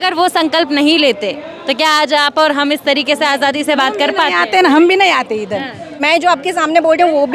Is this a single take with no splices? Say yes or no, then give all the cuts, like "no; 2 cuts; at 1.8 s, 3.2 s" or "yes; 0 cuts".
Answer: no; 1 cut; at 6.0 s